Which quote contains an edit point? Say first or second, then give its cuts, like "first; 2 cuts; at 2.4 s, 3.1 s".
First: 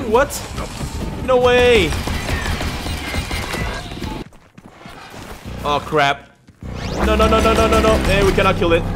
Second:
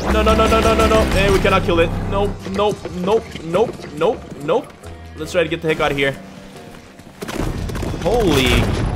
first; 1 cut; at 4.2 s